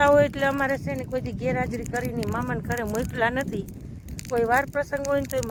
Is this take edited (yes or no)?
no